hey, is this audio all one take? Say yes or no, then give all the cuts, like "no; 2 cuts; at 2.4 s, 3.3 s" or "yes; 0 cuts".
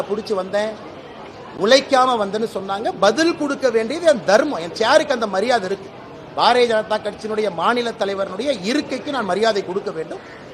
yes; 0 cuts